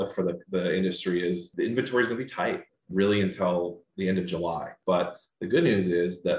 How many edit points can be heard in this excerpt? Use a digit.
3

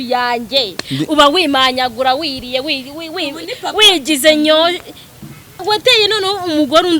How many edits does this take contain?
1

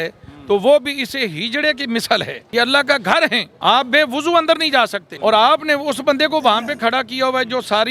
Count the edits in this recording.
3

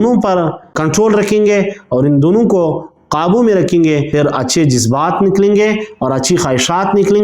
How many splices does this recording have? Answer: 1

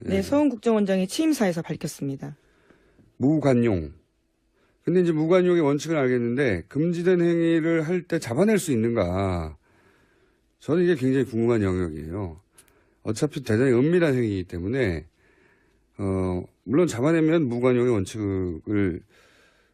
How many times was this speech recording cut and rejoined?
0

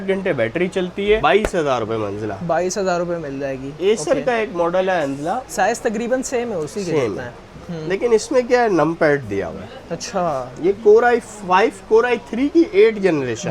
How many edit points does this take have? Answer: 0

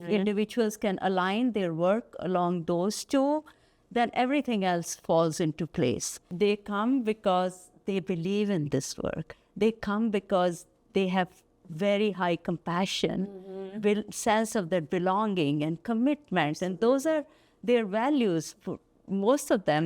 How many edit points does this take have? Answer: 1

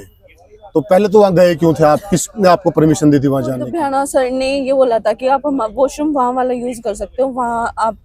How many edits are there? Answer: 0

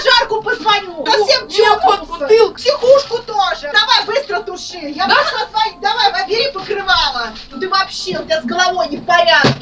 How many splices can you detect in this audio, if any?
3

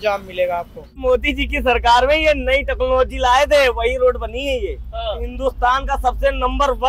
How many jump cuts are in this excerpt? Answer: 2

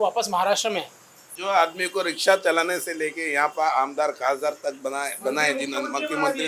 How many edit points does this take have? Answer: 1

